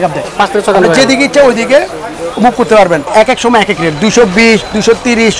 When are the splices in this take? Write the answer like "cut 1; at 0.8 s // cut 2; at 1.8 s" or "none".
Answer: cut 1; at 3.1 s